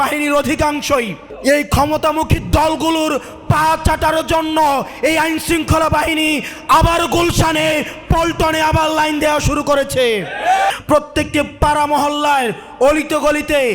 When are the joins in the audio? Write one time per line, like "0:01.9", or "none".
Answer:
0:01.2
0:10.7